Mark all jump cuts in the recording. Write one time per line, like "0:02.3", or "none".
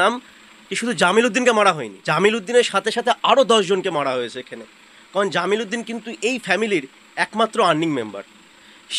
0:01.9